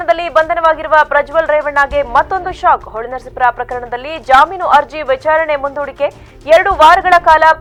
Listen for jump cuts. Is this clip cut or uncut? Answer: uncut